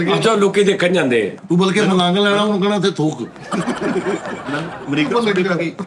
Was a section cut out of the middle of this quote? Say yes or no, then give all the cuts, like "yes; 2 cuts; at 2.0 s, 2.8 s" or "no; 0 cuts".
yes; 1 cut; at 1.4 s